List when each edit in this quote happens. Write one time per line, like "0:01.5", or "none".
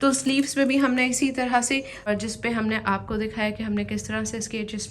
0:02.1